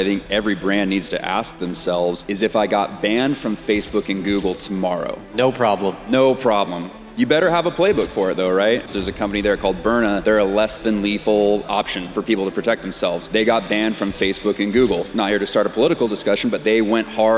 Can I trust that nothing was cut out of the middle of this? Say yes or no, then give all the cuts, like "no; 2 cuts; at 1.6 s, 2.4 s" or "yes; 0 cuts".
no; 7 cuts; at 2.2 s, 5.2 s, 8.9 s, 10.2 s, 11.6 s, 13.2 s, 15.1 s